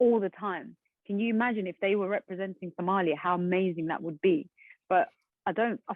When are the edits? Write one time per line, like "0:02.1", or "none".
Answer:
none